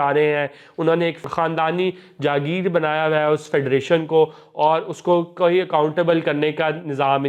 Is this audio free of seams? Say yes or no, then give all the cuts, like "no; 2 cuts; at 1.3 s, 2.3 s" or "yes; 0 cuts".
no; 1 cut; at 1.2 s